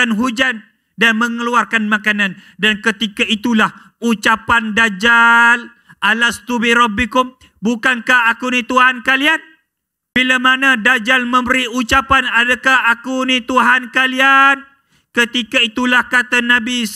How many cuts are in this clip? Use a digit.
1